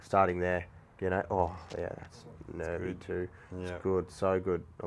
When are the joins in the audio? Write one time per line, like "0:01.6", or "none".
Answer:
none